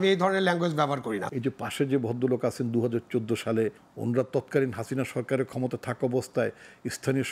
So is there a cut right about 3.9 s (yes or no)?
yes